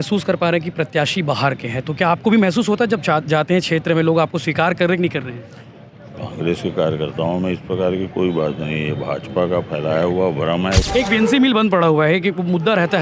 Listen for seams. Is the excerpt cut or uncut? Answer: cut